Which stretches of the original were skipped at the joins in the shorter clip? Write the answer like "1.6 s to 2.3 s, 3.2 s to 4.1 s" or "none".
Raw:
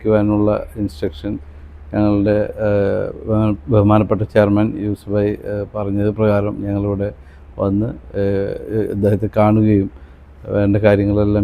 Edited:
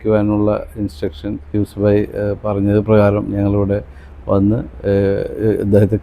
1.5 s to 4.8 s